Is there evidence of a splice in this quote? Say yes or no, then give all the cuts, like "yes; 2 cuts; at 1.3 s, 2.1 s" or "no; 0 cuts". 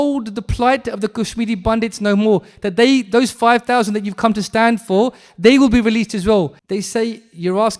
yes; 1 cut; at 6.6 s